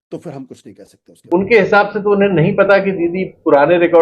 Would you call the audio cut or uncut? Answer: cut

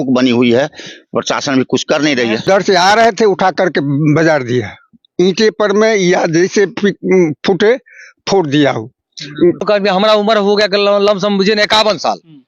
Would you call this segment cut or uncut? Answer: cut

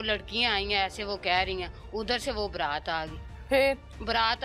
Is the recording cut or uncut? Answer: uncut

